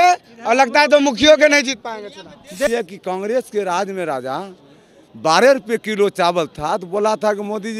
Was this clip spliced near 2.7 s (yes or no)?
yes